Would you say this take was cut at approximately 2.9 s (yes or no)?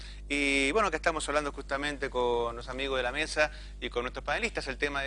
no